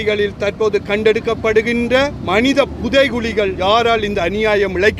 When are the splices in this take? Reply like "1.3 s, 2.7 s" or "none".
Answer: 2.2 s, 3.6 s